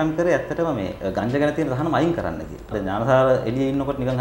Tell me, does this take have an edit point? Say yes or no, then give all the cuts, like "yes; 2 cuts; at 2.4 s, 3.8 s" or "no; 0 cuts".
yes; 2 cuts; at 0.9 s, 2.7 s